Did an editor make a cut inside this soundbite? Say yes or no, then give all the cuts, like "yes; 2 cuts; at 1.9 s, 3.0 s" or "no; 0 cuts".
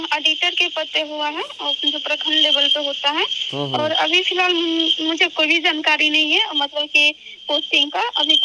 no; 0 cuts